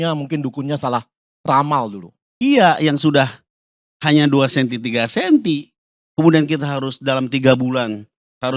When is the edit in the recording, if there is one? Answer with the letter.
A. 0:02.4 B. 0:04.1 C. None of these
A